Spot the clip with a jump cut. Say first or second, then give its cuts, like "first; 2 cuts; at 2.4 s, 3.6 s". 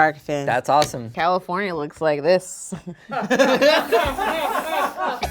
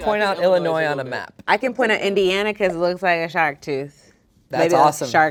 first; 1 cut; at 1.0 s